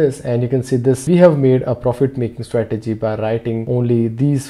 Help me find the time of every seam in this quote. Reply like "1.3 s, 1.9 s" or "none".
1.0 s, 3.6 s